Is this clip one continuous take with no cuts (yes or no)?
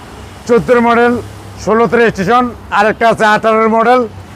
yes